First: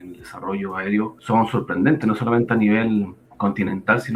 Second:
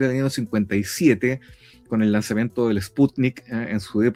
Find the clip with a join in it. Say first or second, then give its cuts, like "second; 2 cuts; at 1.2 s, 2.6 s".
first; 2 cuts; at 1.2 s, 3.2 s